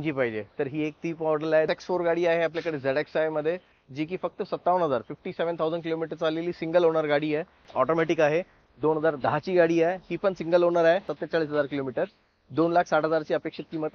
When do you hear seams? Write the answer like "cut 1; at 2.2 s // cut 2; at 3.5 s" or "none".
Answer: cut 1; at 1.7 s // cut 2; at 7.7 s // cut 3; at 11.2 s